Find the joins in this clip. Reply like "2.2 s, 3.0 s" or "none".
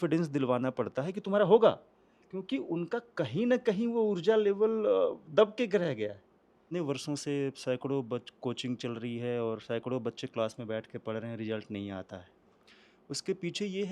6.6 s